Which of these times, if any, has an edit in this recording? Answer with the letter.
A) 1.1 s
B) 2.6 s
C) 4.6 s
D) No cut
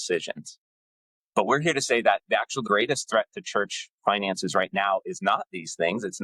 B